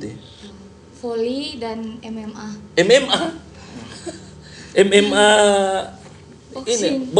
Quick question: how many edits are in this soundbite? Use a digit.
0